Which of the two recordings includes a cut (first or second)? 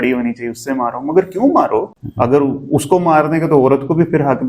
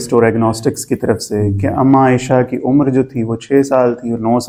first